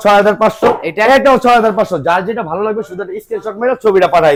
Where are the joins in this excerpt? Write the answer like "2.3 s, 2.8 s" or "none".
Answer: none